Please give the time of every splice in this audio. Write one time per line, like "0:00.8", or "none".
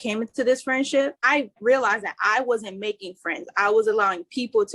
0:01.5